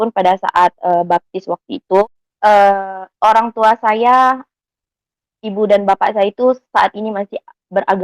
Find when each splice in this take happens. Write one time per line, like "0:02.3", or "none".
0:02.0